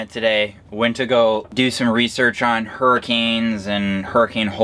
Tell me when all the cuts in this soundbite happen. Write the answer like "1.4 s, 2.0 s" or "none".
1.5 s